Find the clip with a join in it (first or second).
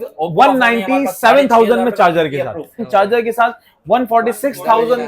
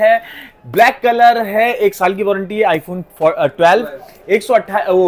first